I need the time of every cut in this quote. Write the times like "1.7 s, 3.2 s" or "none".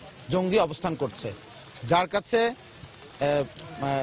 none

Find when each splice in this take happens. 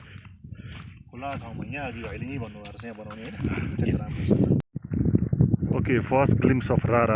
4.6 s

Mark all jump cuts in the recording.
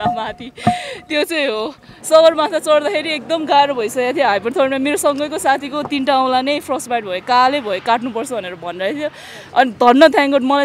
1.9 s

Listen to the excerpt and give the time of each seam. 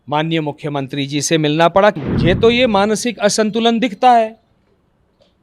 2.0 s

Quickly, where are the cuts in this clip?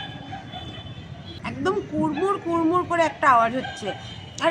1.4 s

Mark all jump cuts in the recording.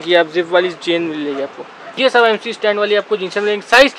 1.8 s

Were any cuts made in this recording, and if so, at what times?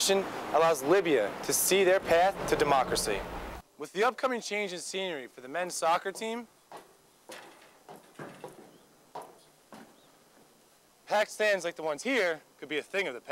3.5 s

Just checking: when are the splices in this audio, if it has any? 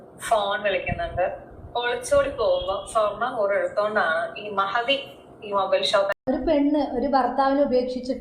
6.1 s

